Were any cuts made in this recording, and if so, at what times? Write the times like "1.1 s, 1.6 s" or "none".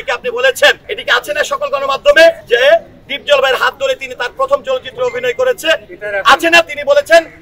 0.9 s, 2.4 s